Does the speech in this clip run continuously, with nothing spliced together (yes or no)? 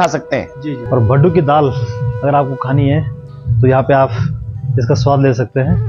no